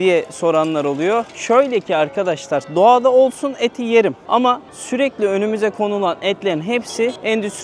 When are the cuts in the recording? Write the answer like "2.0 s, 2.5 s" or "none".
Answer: none